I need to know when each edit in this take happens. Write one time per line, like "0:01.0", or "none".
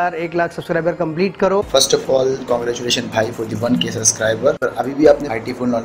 0:01.7
0:04.6